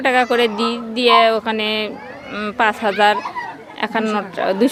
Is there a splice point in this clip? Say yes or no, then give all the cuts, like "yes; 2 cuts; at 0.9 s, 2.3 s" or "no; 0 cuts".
no; 0 cuts